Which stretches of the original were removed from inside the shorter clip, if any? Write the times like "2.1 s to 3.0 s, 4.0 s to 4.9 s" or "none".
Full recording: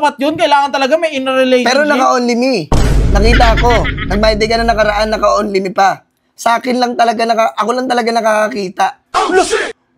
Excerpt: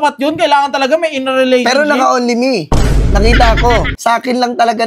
3.9 s to 6.3 s